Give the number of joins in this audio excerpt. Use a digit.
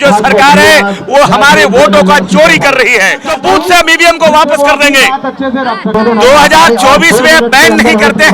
2